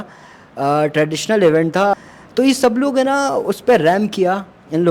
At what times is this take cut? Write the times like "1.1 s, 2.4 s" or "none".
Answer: 1.9 s